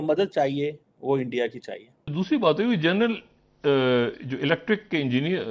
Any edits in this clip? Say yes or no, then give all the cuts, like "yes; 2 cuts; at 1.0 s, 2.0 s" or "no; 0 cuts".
yes; 1 cut; at 2.1 s